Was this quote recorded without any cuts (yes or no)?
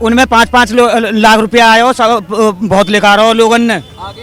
yes